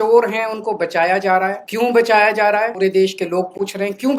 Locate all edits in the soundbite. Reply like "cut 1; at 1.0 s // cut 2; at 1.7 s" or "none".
cut 1; at 1.6 s // cut 2; at 2.7 s